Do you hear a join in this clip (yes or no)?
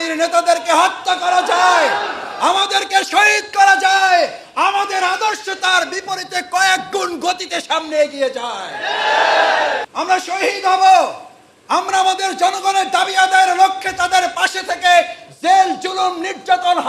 yes